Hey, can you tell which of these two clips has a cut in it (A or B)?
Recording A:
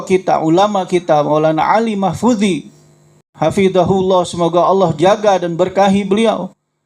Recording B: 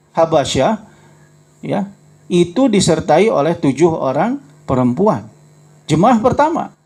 A